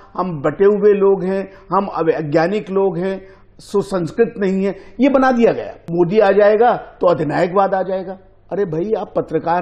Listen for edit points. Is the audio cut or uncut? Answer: cut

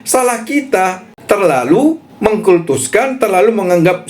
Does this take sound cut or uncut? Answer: cut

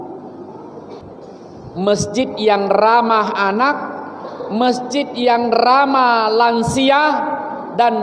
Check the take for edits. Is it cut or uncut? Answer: cut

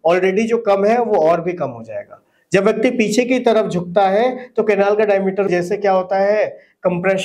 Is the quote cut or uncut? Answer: cut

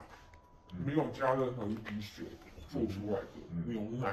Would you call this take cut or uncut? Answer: uncut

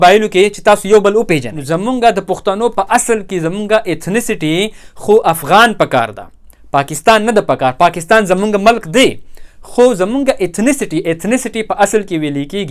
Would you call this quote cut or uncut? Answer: cut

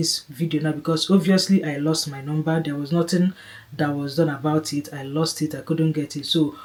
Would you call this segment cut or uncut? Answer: uncut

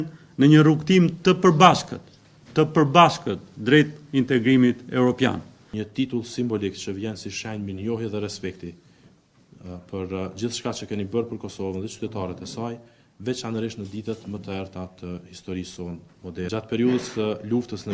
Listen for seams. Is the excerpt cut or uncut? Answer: uncut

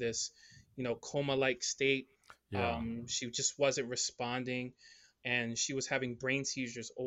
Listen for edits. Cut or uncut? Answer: uncut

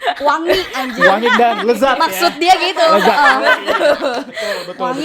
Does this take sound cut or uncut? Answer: uncut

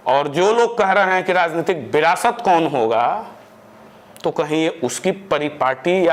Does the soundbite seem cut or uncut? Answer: uncut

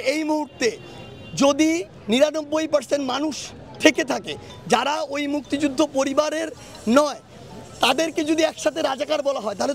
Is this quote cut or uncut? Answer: uncut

